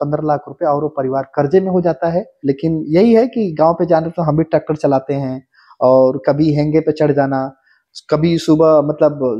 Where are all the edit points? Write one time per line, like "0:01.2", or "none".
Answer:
0:02.3